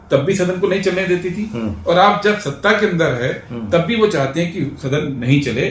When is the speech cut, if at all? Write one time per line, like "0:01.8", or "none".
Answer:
none